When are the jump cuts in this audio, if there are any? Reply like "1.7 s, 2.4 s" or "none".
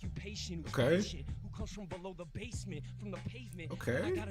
none

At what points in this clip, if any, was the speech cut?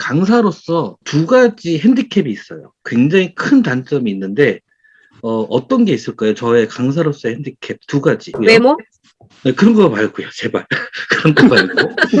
1.0 s, 8.3 s

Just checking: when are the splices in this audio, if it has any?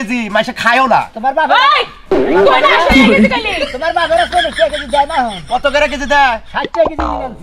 none

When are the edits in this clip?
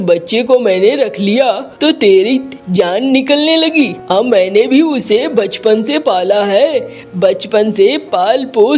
none

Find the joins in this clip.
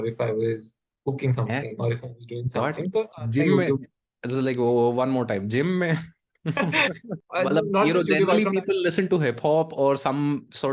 7.2 s

